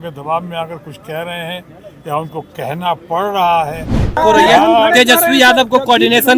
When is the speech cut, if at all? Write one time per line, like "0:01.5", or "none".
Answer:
0:04.2